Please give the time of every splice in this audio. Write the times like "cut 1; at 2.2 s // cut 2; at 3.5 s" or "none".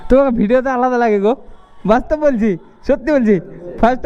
none